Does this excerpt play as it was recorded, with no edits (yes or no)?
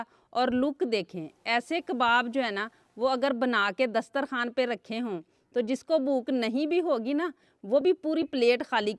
yes